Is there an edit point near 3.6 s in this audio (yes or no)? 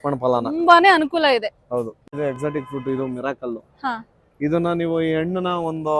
no